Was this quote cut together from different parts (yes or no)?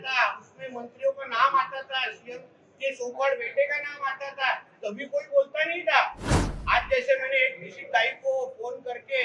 no